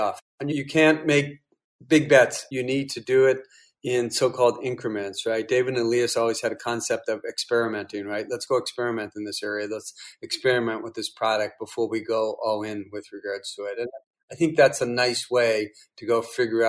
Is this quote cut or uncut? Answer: uncut